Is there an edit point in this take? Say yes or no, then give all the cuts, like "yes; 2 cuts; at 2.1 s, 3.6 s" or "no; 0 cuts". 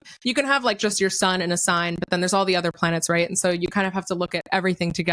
no; 0 cuts